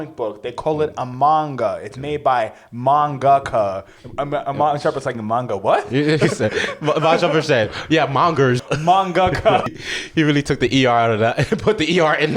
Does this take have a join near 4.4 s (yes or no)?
no